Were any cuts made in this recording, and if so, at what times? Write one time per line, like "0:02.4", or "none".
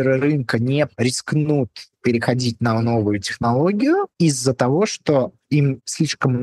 0:00.9
0:04.1